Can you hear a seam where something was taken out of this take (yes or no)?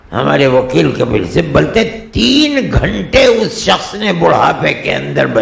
no